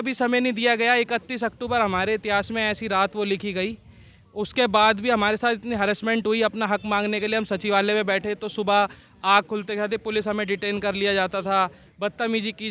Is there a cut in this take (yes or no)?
no